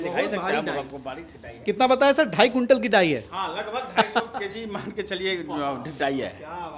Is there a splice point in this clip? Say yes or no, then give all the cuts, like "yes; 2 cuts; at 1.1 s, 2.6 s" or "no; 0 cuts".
no; 0 cuts